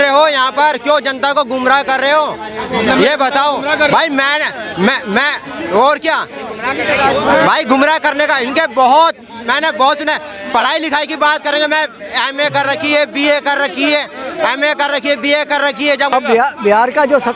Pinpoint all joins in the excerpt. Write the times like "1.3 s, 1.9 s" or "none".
16.1 s